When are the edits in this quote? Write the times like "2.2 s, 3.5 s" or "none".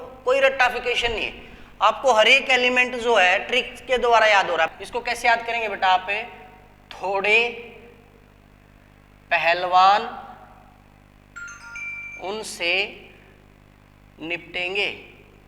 4.7 s